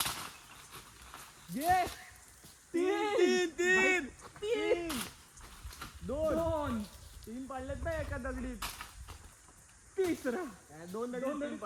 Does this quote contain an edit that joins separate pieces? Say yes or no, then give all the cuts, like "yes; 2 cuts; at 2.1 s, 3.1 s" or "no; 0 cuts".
no; 0 cuts